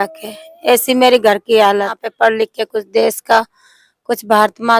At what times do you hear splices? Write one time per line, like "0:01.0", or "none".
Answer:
0:02.0